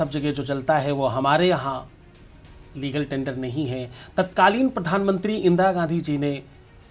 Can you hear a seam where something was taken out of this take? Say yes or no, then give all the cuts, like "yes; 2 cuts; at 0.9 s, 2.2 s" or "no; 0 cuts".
no; 0 cuts